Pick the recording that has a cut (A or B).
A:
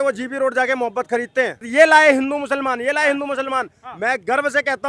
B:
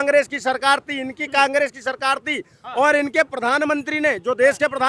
A